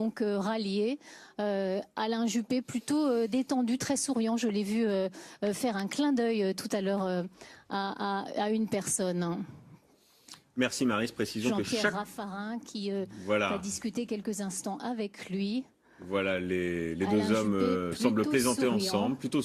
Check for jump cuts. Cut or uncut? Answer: uncut